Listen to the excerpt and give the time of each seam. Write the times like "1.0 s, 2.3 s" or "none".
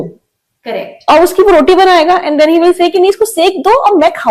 none